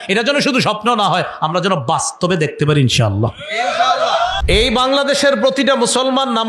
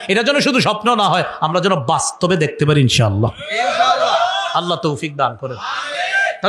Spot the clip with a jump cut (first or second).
first